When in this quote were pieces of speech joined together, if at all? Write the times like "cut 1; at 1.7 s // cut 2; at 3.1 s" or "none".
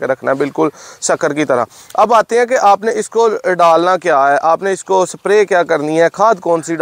none